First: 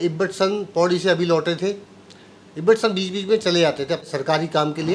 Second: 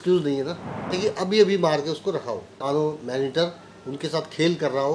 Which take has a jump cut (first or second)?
second